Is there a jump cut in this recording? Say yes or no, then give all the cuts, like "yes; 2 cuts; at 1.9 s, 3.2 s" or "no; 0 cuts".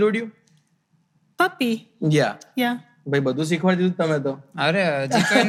no; 0 cuts